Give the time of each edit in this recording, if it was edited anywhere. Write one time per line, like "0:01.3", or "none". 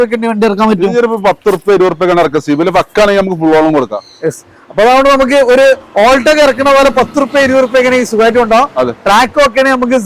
none